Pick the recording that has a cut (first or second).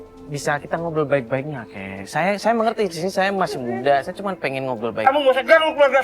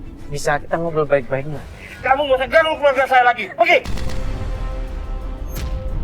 second